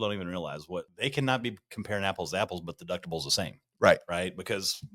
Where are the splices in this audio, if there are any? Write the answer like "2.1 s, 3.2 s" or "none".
0.9 s